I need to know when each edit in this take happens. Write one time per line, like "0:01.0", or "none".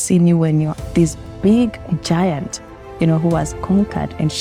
none

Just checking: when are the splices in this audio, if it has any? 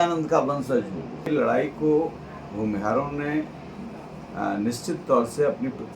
0:01.3

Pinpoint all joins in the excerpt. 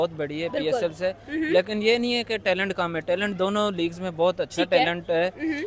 none

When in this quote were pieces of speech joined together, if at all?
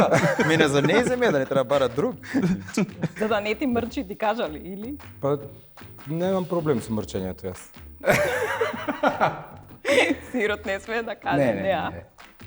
0:03.2

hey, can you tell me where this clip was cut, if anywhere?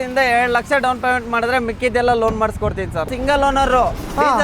0:03.1

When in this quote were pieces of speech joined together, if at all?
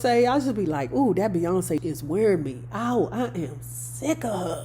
0:01.8

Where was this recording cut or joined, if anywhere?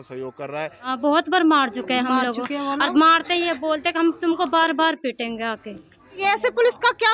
0:00.9
0:06.2

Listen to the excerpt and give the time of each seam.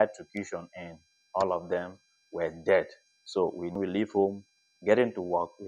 0:03.8

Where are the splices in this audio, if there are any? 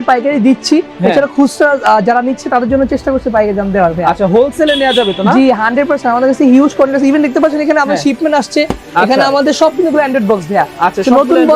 none

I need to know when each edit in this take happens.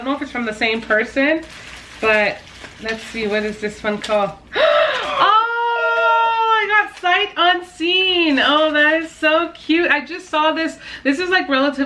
none

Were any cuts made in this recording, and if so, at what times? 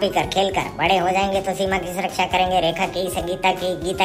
none

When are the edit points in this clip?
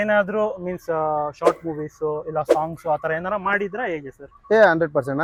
none

